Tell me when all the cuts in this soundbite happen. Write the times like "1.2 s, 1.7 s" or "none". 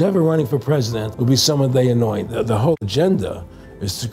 1.0 s, 2.5 s